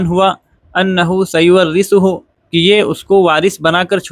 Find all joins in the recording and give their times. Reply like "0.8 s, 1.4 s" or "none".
2.6 s